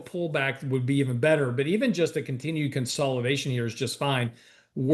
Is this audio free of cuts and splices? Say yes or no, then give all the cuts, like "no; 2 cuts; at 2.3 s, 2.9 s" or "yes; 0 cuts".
yes; 0 cuts